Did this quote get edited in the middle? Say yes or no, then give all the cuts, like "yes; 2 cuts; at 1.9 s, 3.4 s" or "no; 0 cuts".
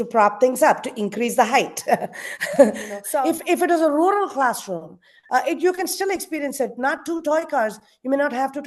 yes; 1 cut; at 2.9 s